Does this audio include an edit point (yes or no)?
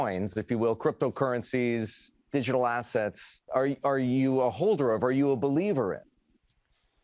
yes